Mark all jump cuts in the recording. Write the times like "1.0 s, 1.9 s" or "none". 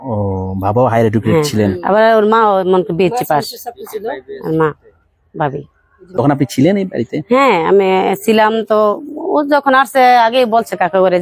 6.0 s